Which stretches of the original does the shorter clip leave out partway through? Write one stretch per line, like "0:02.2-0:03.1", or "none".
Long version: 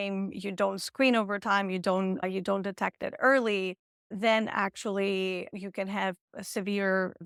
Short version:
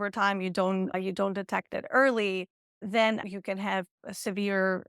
0:04.5-0:05.5